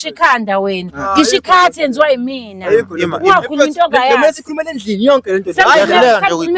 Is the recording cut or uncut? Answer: uncut